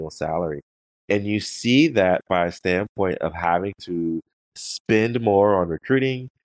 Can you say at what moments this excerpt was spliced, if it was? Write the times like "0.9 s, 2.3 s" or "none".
4.4 s

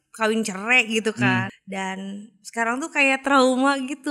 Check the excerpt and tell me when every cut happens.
1.5 s

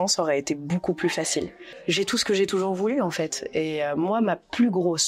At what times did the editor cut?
1.6 s

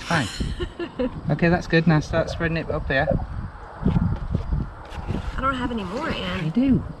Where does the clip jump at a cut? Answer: none

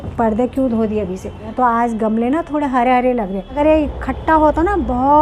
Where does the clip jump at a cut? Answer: 1.5 s, 3.5 s

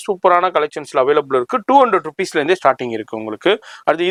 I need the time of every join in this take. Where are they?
none

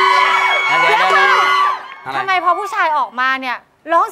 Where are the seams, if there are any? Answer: none

